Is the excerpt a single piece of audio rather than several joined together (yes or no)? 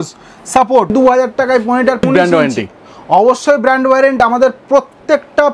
no